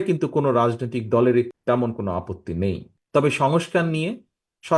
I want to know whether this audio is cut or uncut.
cut